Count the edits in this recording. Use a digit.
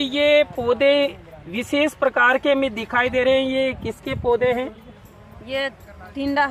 0